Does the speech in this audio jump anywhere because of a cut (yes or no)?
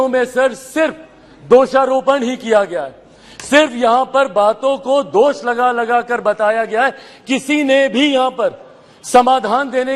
no